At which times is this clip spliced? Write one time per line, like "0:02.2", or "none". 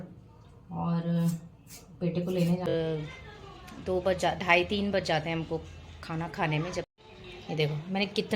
0:02.7
0:06.9